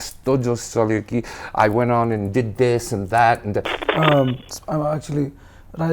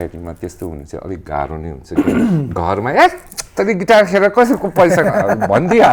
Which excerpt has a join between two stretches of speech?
first; 1 cut; at 3.8 s

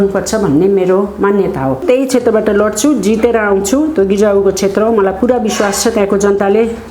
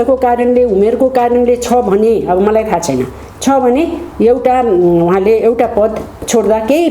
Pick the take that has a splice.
first; 1 cut; at 1.8 s

